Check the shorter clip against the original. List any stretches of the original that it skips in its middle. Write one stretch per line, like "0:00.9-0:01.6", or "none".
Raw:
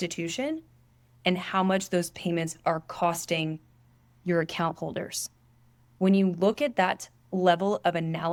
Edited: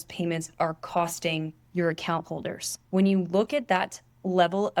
0:03.6-0:04.1
0:05.2-0:05.8

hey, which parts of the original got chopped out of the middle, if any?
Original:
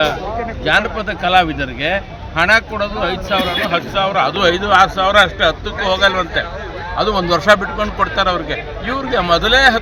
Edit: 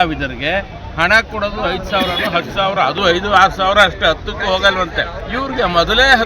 0:06.6-0:08.7

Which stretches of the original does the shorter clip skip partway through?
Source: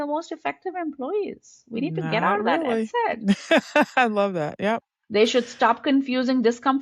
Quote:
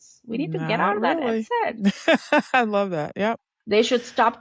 none

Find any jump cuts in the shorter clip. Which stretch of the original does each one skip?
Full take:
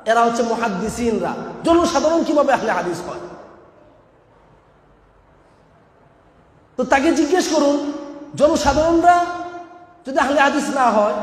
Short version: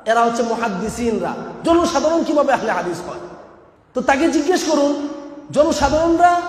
0:04.2-0:07.1

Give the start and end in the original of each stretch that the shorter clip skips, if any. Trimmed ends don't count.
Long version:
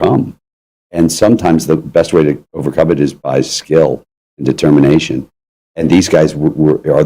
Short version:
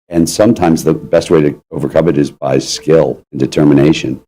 0:04.1-0:04.3

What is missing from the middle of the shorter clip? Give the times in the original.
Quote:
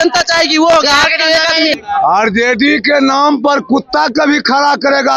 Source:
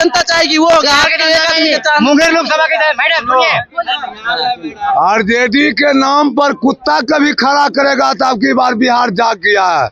0:01.8-0:04.7

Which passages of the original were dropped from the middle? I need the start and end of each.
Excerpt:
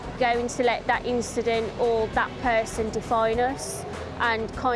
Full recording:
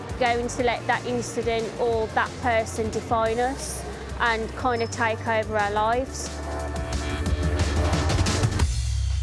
none

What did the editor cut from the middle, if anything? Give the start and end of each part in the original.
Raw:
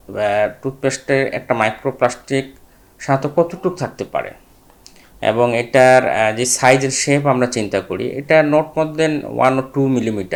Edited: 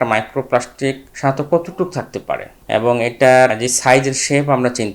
0:02.6-0:02.9
0:04.4-0:05.1
0:06.1-0:06.3

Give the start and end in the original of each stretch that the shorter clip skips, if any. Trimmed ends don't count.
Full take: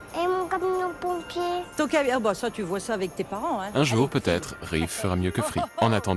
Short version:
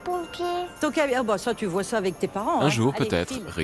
0:03.6-0:03.8

